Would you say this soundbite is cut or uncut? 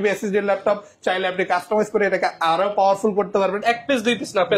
cut